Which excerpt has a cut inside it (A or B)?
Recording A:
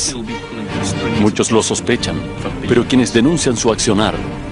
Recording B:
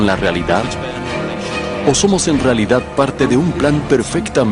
B